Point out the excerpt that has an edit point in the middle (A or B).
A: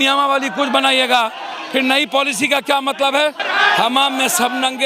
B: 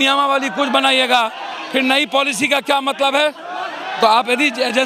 A